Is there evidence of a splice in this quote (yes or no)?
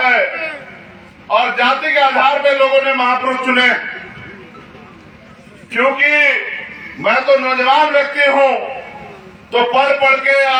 no